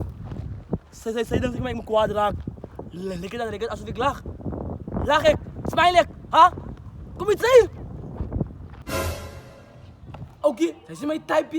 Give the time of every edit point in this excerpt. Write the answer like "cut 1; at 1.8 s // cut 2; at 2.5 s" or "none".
cut 1; at 8.7 s

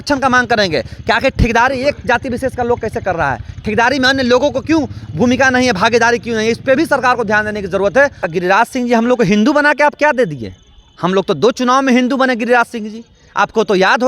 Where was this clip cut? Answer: cut 1; at 8.3 s

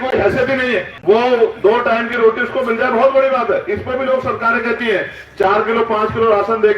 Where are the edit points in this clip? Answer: cut 1; at 0.9 s

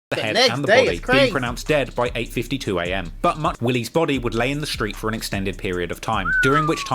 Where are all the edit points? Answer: cut 1; at 3.5 s

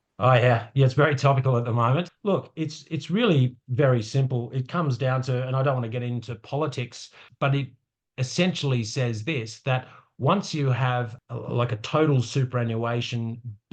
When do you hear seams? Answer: cut 1; at 2.1 s // cut 2; at 7.2 s // cut 3; at 11.2 s

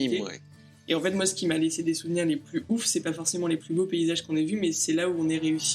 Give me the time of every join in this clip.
none

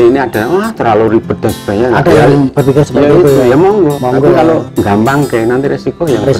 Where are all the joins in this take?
cut 1; at 4.0 s // cut 2; at 4.7 s

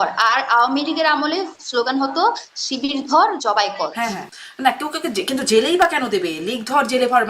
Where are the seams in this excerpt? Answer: cut 1; at 4.2 s

